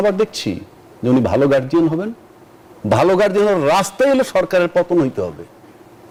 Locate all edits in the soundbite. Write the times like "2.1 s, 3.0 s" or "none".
none

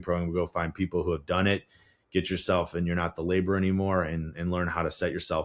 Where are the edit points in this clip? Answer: none

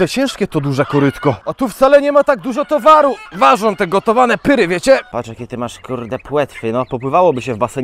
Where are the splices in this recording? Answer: 1.5 s, 3.2 s, 5.1 s

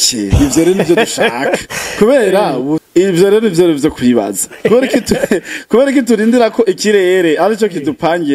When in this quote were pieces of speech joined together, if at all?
2.8 s

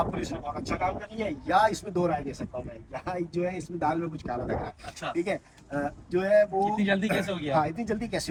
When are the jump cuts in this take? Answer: none

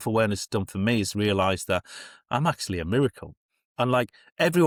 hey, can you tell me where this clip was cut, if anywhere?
none

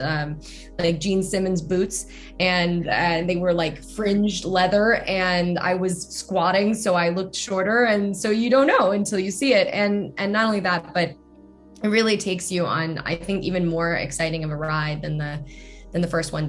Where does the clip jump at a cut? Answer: none

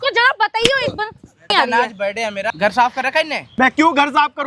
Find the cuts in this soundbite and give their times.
1.5 s, 2.5 s, 3.4 s

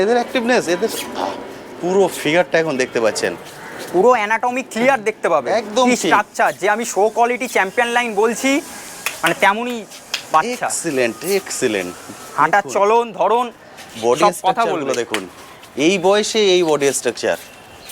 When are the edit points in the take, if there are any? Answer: none

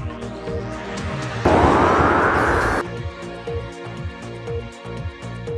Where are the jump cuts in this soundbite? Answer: 0.9 s

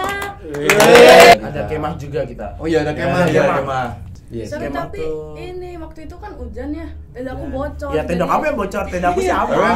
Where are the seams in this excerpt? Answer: 1.3 s, 4.1 s

